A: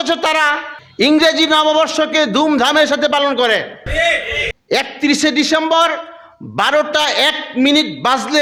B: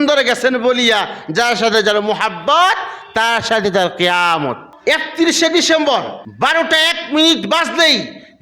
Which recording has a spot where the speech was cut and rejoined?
B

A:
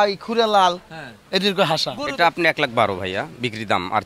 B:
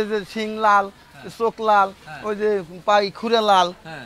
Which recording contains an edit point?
A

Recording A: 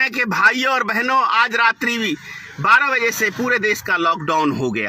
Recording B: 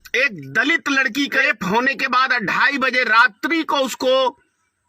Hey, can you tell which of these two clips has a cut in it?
B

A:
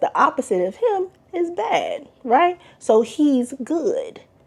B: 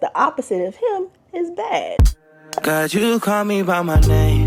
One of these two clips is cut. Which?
B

